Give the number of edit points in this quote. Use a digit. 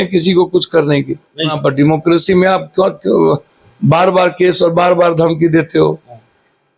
1